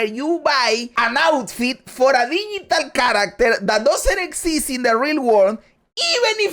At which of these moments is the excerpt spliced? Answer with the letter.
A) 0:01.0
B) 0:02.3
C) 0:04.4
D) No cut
A